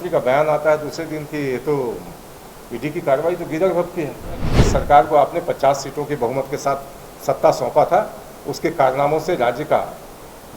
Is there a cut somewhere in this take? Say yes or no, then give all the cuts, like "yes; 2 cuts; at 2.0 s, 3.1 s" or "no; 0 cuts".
yes; 1 cut; at 4.5 s